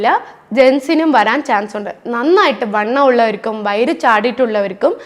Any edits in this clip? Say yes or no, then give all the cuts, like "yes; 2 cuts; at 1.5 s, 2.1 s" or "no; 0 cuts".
no; 0 cuts